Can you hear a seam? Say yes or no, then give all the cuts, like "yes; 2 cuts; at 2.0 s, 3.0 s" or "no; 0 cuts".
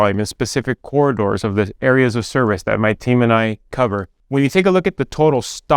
yes; 1 cut; at 4.1 s